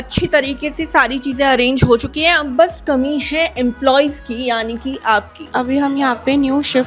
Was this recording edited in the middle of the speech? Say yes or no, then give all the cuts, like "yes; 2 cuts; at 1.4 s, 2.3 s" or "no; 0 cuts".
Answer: yes; 1 cut; at 5.4 s